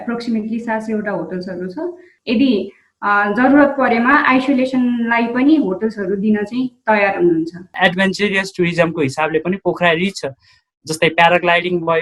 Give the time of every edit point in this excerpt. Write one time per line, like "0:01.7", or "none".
0:02.1
0:07.8